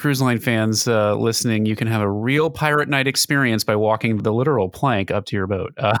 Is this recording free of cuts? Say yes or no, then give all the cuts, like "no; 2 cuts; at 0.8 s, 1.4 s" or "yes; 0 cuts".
yes; 0 cuts